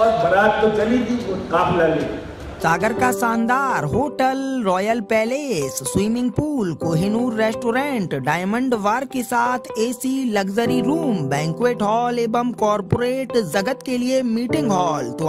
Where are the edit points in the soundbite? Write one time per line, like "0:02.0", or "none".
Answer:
0:02.4